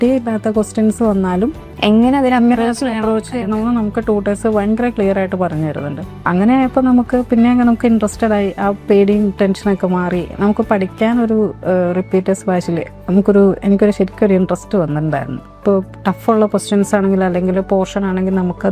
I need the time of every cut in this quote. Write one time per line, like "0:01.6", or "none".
0:01.7
0:06.0
0:15.5